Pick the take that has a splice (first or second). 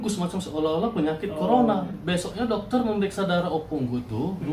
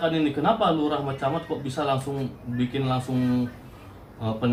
first